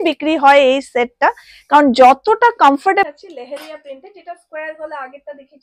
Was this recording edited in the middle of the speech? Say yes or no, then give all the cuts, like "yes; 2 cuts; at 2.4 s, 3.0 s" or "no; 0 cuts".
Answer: yes; 1 cut; at 3.1 s